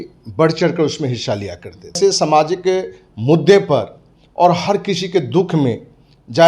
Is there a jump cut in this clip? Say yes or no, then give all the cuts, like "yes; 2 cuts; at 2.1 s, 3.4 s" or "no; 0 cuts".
yes; 1 cut; at 2.0 s